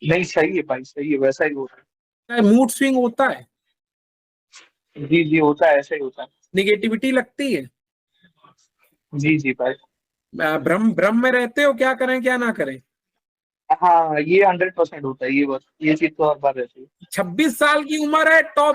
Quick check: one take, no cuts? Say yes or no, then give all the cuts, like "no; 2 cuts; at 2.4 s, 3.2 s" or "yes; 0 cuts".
no; 1 cut; at 2.3 s